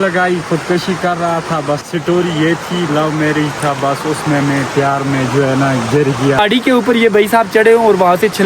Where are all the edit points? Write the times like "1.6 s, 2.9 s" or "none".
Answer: 1.8 s, 6.4 s